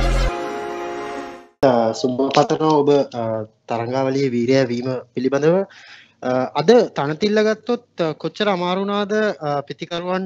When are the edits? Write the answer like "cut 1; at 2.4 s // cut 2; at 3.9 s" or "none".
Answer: cut 1; at 1.4 s